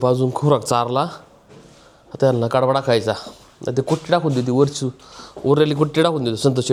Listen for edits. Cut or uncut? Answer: uncut